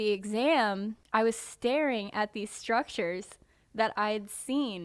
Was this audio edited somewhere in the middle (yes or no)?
yes